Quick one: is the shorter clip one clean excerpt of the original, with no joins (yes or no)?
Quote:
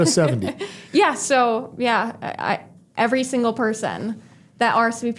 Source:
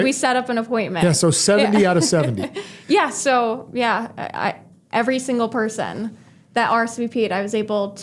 yes